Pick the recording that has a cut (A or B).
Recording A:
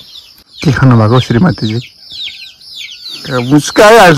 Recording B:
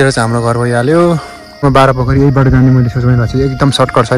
B